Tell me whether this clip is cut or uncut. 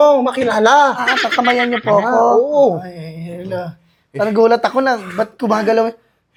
uncut